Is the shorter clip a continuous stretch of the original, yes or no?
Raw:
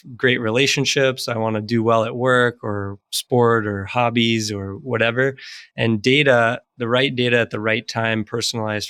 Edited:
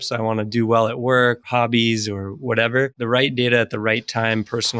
no